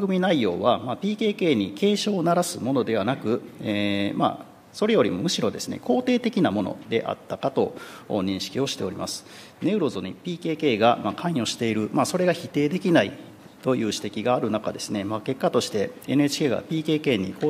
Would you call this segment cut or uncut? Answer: uncut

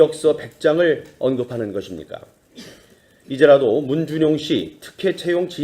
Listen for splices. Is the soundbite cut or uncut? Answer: uncut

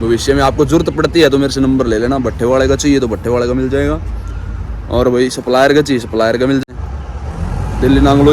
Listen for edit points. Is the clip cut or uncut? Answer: cut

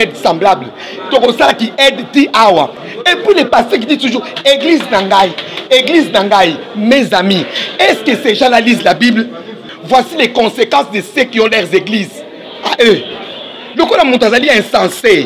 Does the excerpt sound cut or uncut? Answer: cut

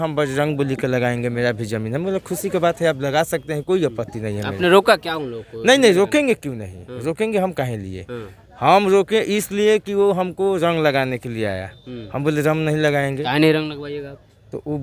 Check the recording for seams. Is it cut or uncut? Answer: uncut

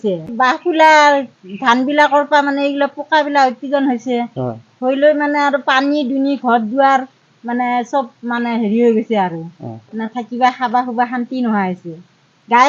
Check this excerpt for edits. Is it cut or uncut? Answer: uncut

